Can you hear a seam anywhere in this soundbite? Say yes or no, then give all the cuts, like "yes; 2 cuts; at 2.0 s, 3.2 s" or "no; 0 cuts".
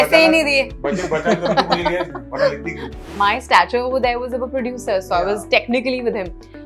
yes; 1 cut; at 3.1 s